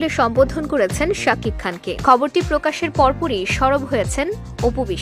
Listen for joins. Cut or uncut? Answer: cut